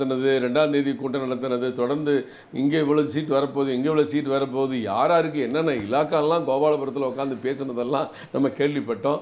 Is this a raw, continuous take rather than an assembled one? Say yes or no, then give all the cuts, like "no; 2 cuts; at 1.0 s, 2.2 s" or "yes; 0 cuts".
yes; 0 cuts